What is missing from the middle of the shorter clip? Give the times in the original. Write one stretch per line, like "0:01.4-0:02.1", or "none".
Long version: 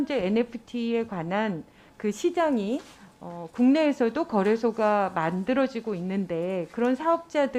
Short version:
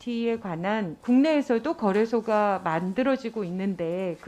0:01.6-0:03.4